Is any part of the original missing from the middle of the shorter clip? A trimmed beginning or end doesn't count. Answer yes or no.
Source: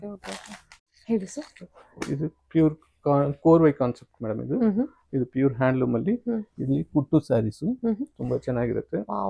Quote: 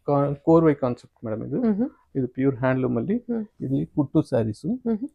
no